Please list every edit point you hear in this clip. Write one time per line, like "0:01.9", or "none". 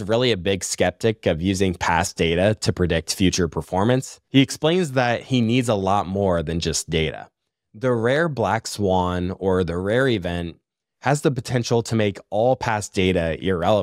0:04.2